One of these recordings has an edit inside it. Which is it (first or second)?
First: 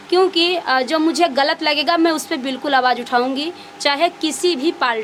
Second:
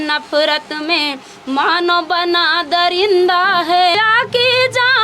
second